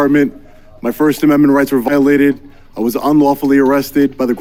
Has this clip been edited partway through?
no; 0 cuts

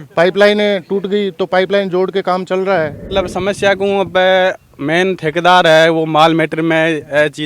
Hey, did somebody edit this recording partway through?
yes; 1 cut; at 3.0 s

